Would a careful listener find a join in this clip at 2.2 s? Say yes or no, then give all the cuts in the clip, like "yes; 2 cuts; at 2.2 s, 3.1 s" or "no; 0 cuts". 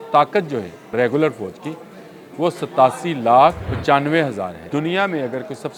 no; 3 cuts; at 0.9 s, 3.7 s, 4.6 s